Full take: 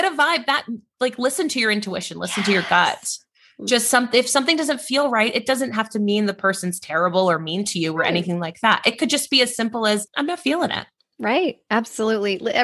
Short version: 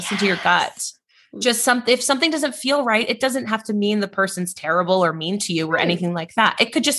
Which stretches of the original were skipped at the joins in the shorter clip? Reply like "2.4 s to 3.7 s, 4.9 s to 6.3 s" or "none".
none